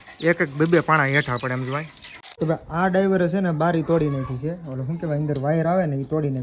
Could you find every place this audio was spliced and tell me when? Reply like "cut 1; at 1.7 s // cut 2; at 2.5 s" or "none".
cut 1; at 2.2 s